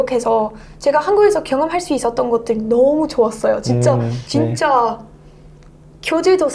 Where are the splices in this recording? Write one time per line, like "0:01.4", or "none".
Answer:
0:04.2